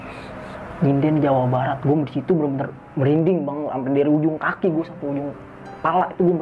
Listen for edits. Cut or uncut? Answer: uncut